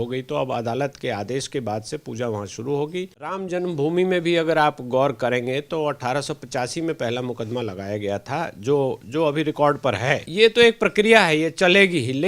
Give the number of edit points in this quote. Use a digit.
2